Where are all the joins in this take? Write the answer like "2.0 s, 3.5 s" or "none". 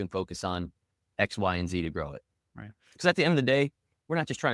2.9 s